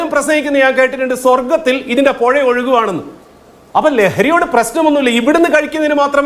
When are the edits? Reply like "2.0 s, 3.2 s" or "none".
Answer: none